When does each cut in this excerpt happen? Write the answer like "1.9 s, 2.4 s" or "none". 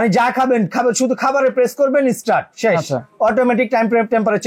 none